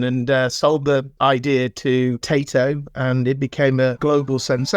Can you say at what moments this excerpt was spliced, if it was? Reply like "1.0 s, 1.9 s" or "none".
1.1 s, 2.2 s, 4.0 s